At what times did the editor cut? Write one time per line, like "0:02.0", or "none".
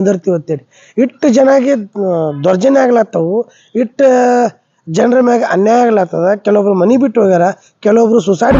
none